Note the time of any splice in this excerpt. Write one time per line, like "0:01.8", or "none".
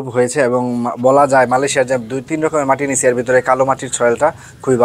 none